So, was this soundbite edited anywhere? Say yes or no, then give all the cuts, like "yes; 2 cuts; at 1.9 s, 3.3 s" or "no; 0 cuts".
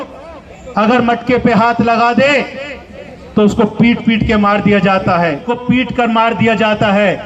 yes; 1 cut; at 5.5 s